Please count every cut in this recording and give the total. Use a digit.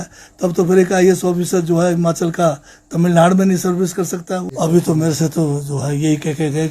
1